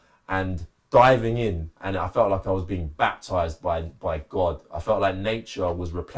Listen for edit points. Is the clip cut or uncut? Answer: uncut